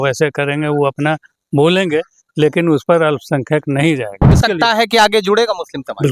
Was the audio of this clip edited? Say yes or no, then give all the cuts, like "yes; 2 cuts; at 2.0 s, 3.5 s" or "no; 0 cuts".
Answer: yes; 1 cut; at 4.4 s